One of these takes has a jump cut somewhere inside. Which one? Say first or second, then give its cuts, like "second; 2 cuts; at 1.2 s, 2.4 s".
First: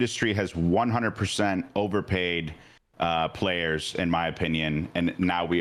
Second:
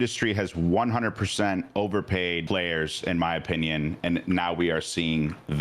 second; 1 cut; at 2.4 s